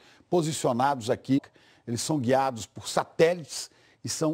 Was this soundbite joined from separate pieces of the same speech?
no; 0 cuts

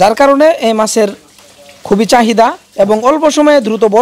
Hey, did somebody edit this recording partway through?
no; 0 cuts

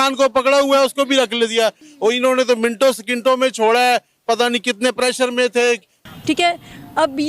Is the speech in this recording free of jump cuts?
no; 2 cuts; at 1.9 s, 5.9 s

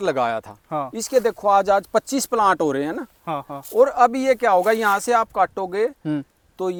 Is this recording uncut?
yes; 0 cuts

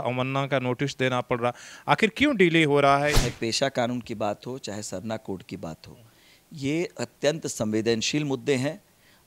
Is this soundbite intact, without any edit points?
no; 1 cut; at 3.2 s

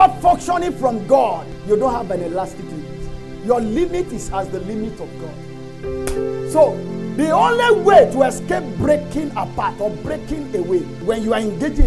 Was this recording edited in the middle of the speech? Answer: yes; 2 cuts; at 1.5 s, 10.9 s

